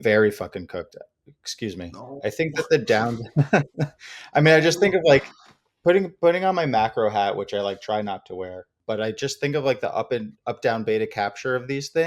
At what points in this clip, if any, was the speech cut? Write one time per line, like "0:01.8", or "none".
0:08.7